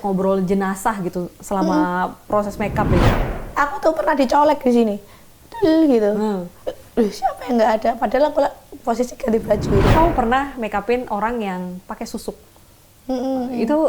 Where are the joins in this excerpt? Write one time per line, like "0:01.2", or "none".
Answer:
0:03.1
0:09.9